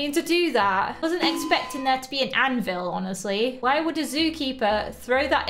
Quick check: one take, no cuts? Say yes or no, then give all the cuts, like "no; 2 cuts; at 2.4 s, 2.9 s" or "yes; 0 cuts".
yes; 0 cuts